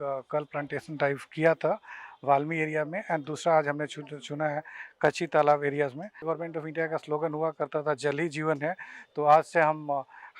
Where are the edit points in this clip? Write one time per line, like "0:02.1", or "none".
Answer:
none